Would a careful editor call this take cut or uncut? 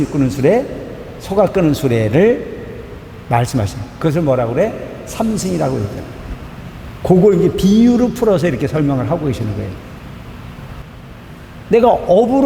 cut